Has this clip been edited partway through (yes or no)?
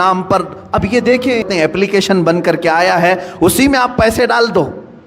yes